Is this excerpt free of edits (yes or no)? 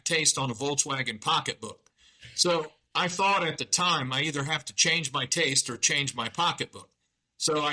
yes